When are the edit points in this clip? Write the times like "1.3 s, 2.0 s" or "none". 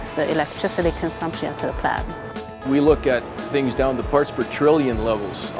2.6 s